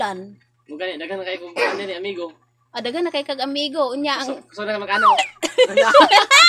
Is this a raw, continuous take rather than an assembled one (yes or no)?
yes